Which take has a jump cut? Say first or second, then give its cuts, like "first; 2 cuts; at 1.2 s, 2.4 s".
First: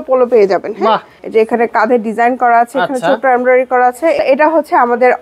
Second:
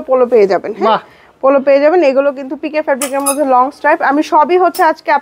first; 2 cuts; at 1.1 s, 4.2 s